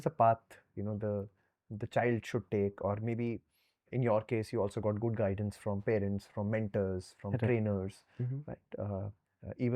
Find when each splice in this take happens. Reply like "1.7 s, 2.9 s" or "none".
none